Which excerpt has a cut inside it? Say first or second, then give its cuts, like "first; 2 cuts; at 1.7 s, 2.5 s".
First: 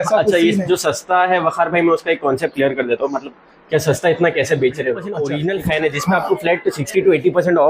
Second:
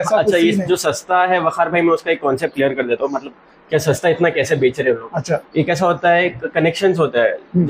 first; 1 cut; at 5.1 s